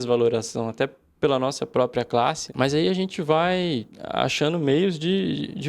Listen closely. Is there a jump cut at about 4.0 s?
yes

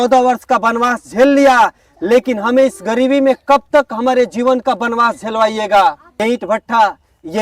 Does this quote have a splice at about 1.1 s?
no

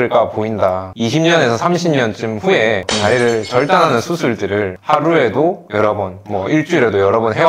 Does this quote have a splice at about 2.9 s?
yes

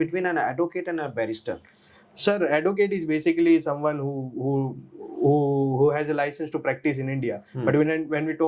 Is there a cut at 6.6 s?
no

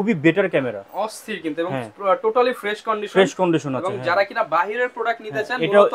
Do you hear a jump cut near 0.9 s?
no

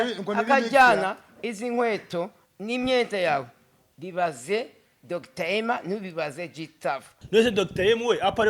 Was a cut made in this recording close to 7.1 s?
yes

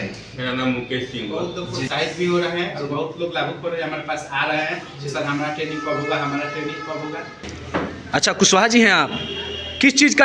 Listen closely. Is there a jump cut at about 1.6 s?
yes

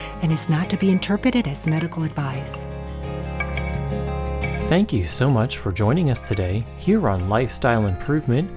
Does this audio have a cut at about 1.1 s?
no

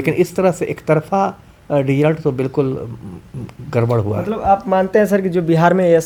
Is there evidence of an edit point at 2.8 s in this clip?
no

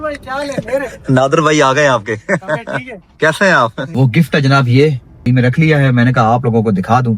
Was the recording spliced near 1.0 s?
no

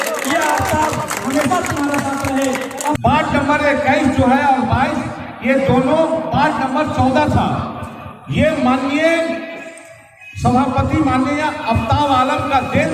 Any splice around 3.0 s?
yes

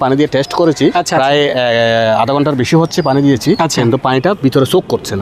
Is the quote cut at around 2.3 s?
no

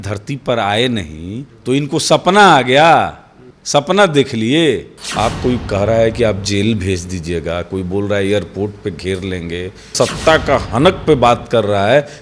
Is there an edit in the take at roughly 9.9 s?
yes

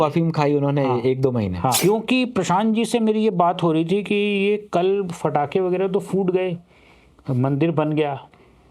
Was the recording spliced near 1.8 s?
yes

